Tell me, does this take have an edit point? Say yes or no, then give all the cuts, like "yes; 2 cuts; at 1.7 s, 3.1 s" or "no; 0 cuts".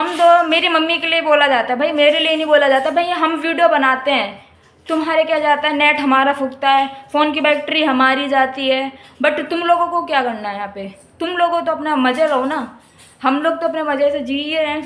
no; 0 cuts